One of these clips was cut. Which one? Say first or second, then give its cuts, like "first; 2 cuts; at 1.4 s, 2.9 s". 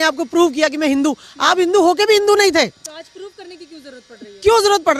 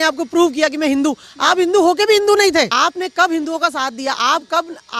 second; 1 cut; at 2.7 s